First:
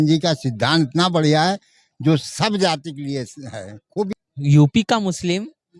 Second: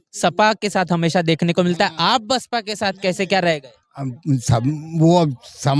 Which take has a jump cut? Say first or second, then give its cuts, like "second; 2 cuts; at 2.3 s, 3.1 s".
first; 1 cut; at 4.1 s